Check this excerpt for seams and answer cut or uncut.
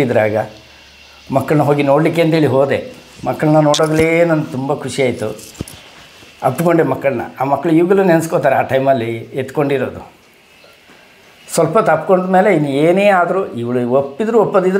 uncut